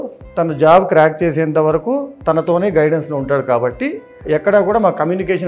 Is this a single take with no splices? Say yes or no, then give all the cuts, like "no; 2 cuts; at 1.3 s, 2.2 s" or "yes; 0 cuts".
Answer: no; 1 cut; at 4.2 s